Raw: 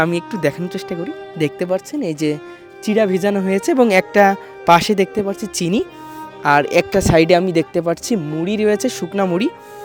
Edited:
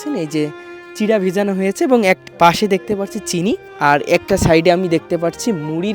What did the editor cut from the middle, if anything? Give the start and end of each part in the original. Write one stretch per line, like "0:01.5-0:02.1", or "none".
0:04.1-0:04.5
0:06.0-0:06.3